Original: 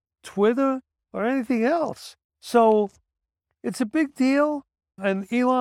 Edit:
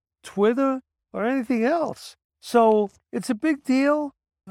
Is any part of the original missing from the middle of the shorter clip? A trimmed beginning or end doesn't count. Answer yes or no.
yes